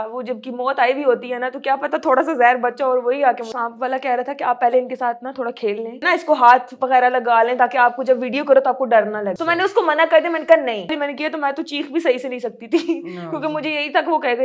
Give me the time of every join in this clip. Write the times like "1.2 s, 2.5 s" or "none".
3.4 s, 6.0 s, 11.0 s